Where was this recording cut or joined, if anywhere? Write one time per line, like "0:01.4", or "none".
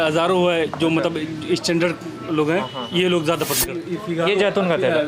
0:03.7